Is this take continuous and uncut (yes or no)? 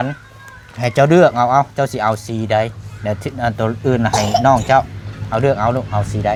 yes